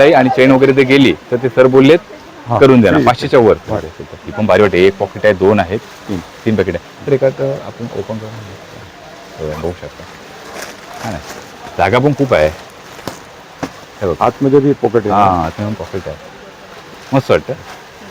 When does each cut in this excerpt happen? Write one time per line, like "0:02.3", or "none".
none